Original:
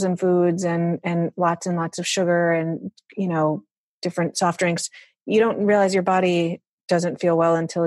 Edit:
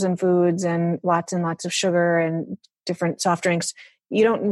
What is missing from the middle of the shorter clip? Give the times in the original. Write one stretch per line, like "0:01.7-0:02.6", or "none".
0:01.0-0:01.3
0:03.0-0:03.8

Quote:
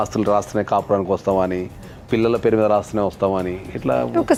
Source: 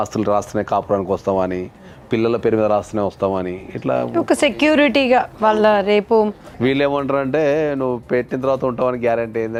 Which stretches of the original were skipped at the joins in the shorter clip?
none

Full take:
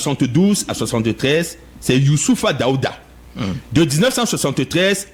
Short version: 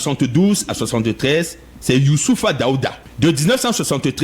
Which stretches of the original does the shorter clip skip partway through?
0:03.1-0:03.6

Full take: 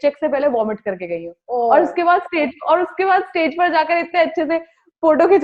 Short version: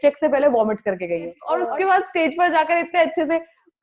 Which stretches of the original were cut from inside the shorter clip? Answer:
0:01.4-0:02.6

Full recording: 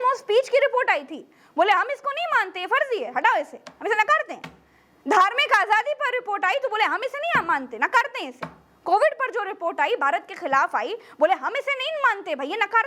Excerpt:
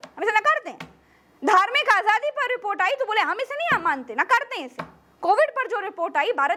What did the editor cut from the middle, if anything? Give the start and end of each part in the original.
none

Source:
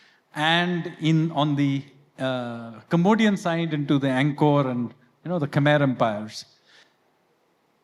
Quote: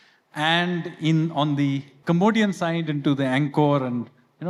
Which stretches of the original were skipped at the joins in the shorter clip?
0:01.9-0:02.8

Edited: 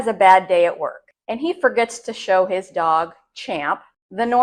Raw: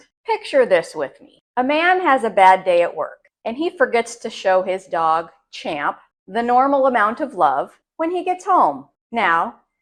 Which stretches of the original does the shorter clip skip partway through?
none

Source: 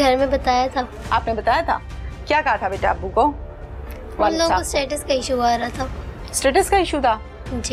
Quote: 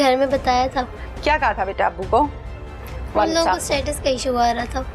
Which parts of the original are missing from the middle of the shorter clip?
0:01.0-0:02.0

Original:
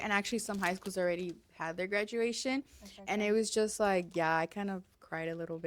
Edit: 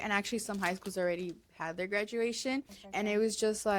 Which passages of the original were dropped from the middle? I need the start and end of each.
0:02.8-0:02.9

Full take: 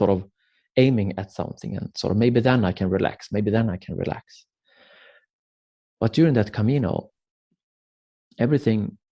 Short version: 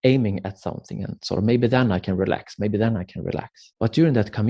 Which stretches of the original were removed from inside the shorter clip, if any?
0:04.3-0:05.8

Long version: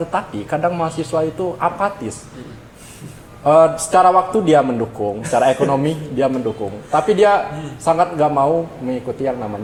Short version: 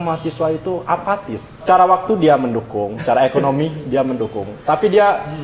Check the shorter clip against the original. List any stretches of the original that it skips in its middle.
0:02.3-0:03.8

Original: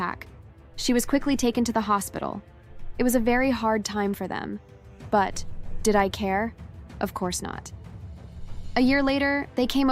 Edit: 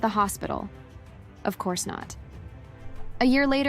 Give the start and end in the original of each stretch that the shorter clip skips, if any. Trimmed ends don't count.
0:02.8-0:06.6

